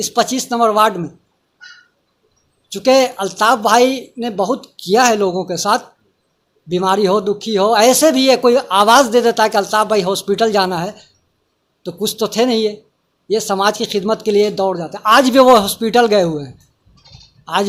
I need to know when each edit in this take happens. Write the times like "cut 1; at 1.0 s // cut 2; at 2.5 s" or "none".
none

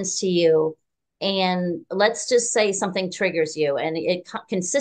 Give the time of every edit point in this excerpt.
none

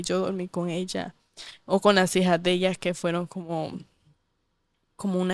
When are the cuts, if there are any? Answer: none

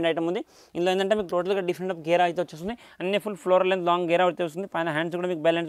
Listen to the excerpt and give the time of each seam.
none

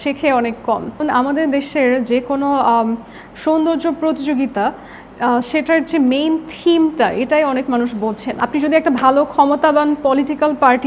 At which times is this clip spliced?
cut 1; at 1.0 s // cut 2; at 8.4 s

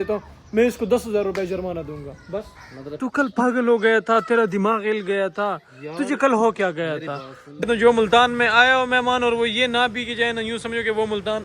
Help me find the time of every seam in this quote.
cut 1; at 2.9 s // cut 2; at 7.6 s

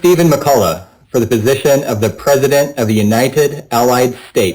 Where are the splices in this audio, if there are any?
none

